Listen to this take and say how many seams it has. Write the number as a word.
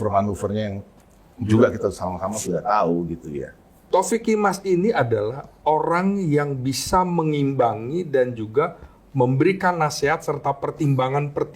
one